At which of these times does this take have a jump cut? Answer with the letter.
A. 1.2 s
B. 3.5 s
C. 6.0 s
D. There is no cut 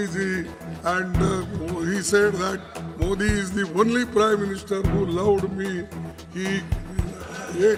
D